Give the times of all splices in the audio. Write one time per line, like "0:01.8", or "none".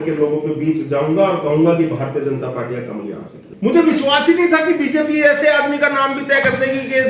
0:03.4